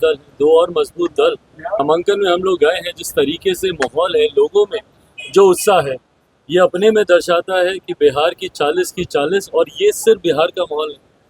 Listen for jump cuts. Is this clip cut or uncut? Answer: cut